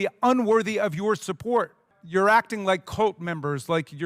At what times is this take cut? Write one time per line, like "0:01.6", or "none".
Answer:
0:01.9